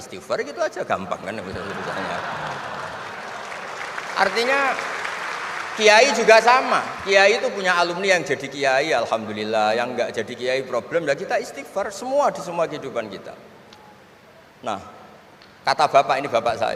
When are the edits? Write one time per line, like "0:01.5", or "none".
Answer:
none

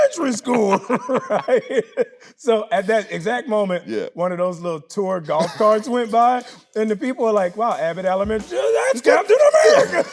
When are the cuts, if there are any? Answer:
0:02.3

